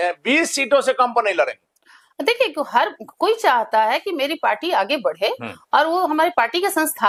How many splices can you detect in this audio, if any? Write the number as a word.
zero